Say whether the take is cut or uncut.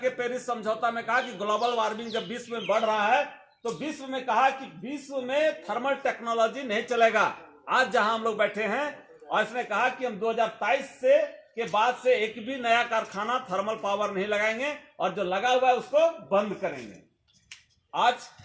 uncut